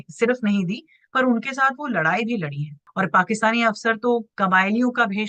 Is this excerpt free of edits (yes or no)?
no